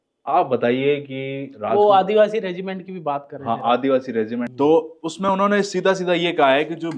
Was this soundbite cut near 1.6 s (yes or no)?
no